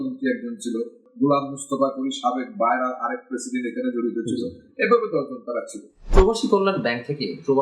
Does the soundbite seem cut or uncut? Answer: cut